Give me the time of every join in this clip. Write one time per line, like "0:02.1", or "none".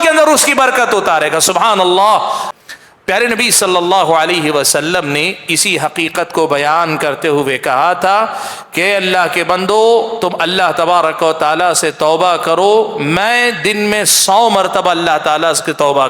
0:02.5